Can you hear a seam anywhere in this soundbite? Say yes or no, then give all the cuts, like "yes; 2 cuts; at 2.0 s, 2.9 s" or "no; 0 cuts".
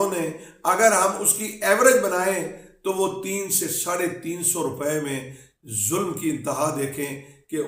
no; 0 cuts